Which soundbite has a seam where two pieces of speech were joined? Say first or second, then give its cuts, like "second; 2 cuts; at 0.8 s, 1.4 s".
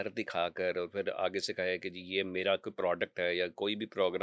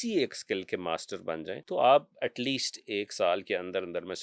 second; 1 cut; at 1.6 s